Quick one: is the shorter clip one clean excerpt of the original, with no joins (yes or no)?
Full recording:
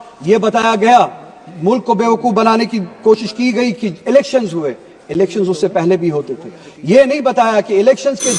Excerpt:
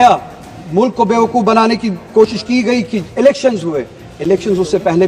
yes